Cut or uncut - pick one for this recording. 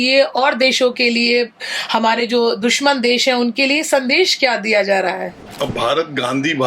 cut